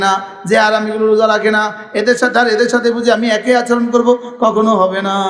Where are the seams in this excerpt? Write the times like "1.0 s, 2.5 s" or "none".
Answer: none